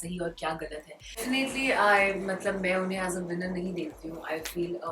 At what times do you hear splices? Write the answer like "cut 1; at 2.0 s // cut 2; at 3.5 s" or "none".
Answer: cut 1; at 1.2 s